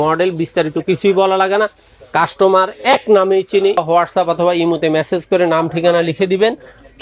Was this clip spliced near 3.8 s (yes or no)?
yes